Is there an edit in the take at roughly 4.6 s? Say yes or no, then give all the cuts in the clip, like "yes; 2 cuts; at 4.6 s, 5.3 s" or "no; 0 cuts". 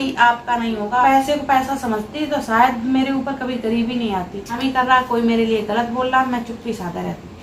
yes; 2 cuts; at 1.0 s, 4.6 s